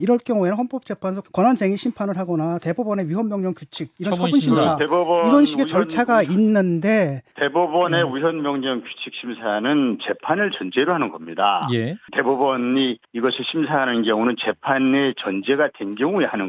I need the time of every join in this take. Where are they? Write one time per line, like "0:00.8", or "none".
none